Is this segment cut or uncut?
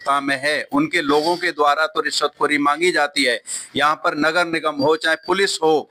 uncut